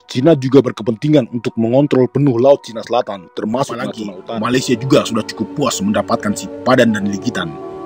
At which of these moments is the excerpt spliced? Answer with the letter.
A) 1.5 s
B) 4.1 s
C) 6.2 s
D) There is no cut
B